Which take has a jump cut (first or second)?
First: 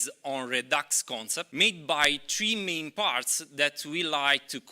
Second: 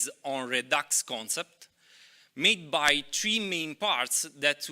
first